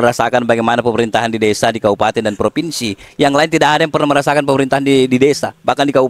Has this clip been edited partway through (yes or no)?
no